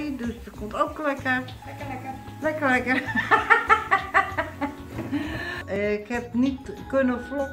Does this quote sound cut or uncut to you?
cut